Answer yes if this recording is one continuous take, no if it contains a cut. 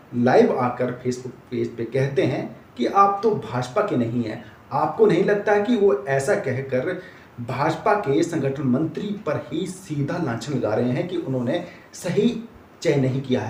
yes